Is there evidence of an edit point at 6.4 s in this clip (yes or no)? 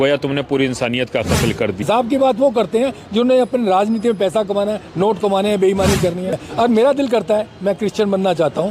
yes